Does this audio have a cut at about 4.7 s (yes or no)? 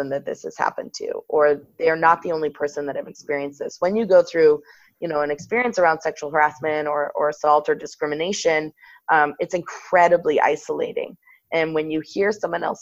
no